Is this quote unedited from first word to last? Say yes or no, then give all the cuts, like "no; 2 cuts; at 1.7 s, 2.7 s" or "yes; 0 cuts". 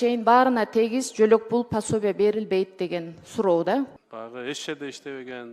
no; 1 cut; at 4.0 s